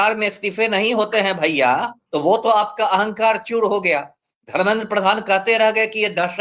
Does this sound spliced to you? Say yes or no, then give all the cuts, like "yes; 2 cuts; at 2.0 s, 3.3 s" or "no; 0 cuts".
yes; 1 cut; at 2.0 s